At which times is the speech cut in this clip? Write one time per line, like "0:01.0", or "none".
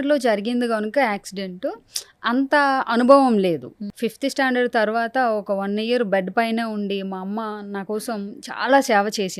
0:03.9